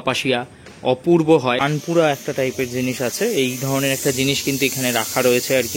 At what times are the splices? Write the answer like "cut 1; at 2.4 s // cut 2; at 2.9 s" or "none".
cut 1; at 1.6 s